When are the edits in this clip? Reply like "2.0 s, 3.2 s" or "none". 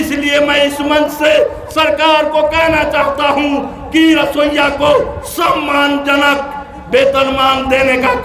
none